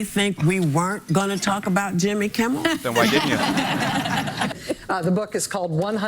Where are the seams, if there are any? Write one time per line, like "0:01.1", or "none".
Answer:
0:04.6